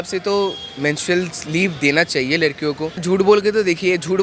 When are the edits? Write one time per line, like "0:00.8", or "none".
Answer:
0:03.0